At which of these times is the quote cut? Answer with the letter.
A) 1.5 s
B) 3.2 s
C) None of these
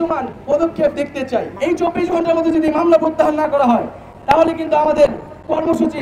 A